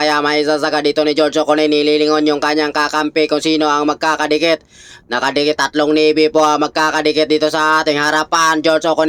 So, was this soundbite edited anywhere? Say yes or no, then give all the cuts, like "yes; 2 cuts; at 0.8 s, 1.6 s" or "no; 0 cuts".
no; 0 cuts